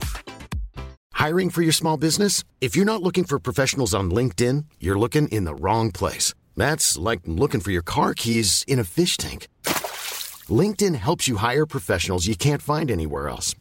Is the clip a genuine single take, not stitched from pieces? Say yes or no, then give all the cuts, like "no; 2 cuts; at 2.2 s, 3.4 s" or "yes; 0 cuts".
no; 1 cut; at 0.9 s